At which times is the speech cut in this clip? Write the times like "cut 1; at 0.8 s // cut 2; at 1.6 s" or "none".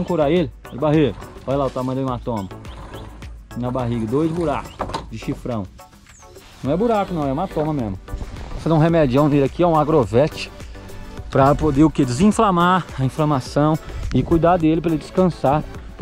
cut 1; at 8.6 s